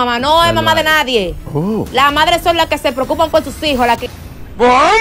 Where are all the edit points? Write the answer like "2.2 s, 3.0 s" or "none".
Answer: 1.4 s, 4.0 s